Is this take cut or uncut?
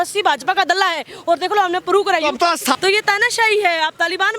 uncut